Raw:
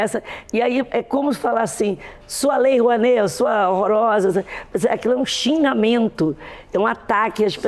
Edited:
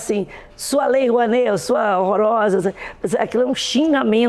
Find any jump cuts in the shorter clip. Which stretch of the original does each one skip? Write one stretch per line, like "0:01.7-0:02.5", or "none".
none